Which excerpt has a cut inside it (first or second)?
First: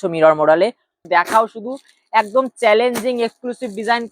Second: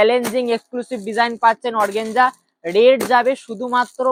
first